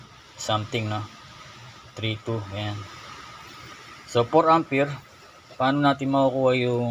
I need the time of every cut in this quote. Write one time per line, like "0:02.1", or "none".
none